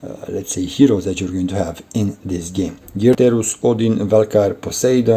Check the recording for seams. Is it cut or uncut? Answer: cut